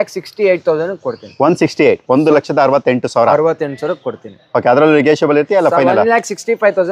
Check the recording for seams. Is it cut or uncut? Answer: uncut